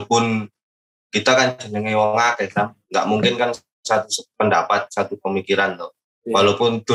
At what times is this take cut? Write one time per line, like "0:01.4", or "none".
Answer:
none